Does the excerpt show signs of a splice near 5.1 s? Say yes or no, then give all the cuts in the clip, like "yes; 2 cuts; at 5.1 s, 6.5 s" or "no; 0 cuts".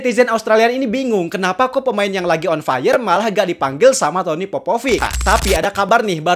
yes; 1 cut; at 5.1 s